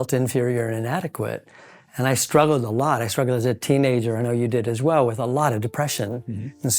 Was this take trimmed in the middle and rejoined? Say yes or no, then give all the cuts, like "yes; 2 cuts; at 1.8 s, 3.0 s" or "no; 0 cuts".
no; 0 cuts